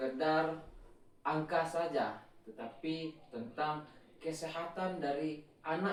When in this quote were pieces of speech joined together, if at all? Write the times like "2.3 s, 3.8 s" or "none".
none